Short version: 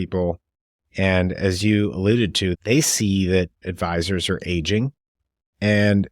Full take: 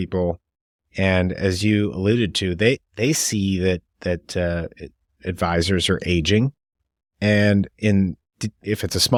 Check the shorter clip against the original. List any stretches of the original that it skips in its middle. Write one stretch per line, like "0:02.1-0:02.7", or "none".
0:02.6-0:02.9
0:03.9-0:05.2